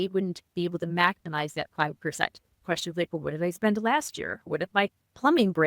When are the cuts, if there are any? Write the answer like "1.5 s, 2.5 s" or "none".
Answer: 2.6 s, 4.5 s